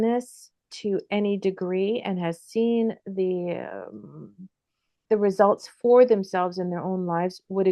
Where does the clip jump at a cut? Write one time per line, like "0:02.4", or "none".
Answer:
none

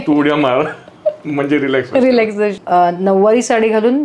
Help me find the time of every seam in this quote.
0:02.6

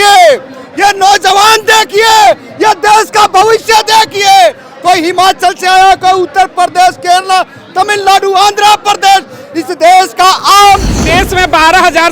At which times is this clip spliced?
0:11.1

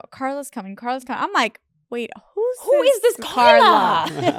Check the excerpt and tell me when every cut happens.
none

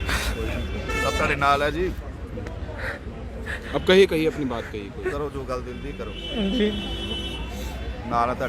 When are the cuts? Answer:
none

